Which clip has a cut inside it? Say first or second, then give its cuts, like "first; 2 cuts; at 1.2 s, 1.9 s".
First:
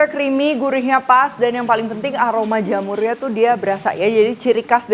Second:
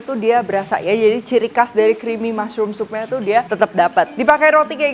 second; 1 cut; at 3.9 s